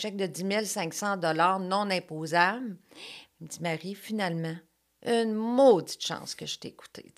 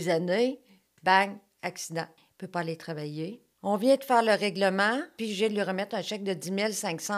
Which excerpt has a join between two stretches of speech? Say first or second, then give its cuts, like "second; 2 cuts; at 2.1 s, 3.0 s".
second; 3 cuts; at 2.2 s, 3.5 s, 5.1 s